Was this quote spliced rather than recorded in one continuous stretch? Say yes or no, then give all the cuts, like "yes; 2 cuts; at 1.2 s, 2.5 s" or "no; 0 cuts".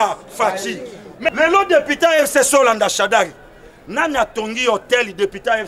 yes; 1 cut; at 1.3 s